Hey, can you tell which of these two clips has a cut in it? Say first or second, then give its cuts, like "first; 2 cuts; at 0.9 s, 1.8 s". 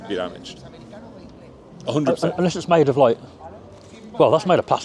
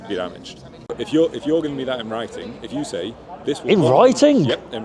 second; 1 cut; at 1.0 s